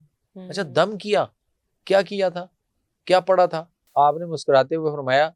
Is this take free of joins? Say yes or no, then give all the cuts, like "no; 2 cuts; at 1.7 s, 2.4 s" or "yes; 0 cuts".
no; 1 cut; at 3.8 s